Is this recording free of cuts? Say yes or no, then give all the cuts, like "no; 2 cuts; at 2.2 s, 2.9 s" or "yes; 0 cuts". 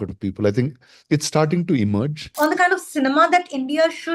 no; 1 cut; at 2.2 s